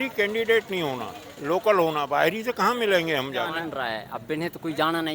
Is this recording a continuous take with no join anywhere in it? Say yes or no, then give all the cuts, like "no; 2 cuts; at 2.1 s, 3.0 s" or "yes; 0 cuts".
no; 1 cut; at 3.6 s